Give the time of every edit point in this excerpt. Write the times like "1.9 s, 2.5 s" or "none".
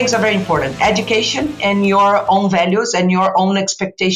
none